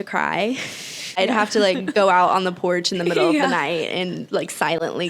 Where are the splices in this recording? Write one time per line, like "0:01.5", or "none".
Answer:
0:01.2